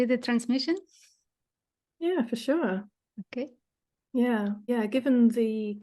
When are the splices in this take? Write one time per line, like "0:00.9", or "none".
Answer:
0:04.7